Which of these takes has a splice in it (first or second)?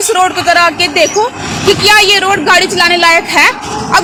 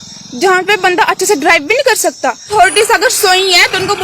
second